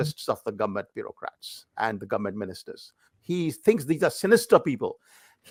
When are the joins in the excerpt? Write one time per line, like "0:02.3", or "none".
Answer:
none

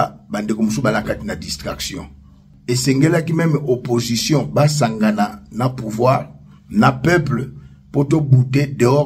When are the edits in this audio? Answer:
0:02.5

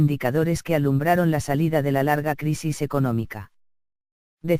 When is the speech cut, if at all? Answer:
none

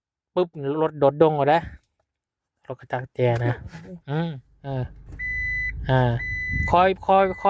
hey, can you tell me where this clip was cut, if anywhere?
0:04.5

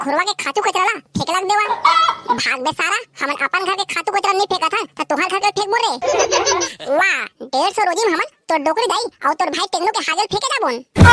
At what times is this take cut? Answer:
0:06.7

